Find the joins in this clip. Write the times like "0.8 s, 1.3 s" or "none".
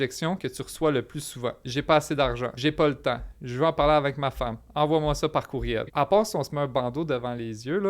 1.6 s, 2.5 s, 5.9 s